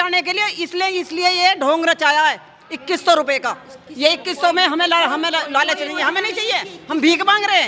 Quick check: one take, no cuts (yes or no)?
yes